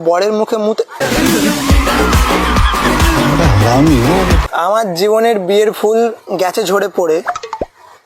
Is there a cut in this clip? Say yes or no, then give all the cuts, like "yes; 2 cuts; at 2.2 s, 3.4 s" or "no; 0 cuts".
yes; 1 cut; at 4.4 s